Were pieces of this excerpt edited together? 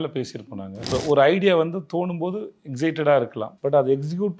yes; 2 cuts; at 0.9 s, 3.5 s

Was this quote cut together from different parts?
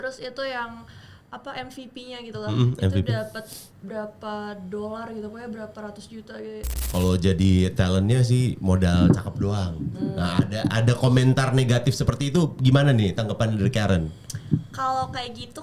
yes; 1 cut; at 6.8 s

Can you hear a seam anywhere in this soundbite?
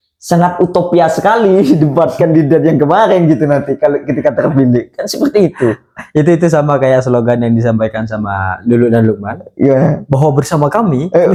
no; 0 cuts

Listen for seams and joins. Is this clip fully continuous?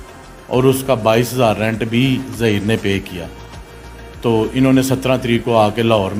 yes; 0 cuts

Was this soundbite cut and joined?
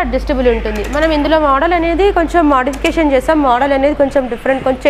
no; 0 cuts

